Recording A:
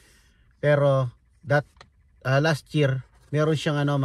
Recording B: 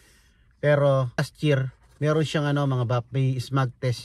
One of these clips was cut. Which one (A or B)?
B